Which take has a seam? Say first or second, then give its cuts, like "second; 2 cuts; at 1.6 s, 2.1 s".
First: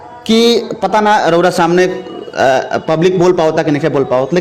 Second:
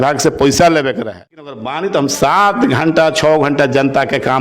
second; 1 cut; at 1.6 s